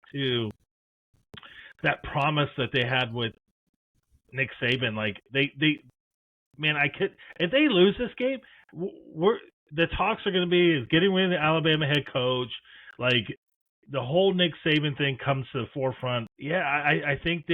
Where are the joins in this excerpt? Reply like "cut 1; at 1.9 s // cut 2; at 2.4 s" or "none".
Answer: cut 1; at 16.3 s